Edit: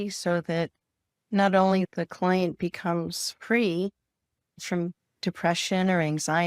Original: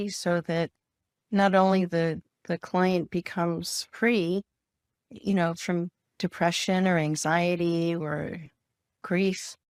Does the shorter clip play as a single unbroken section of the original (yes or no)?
no